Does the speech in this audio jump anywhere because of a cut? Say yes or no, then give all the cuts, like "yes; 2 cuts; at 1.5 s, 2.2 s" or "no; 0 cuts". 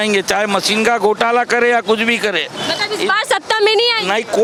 no; 0 cuts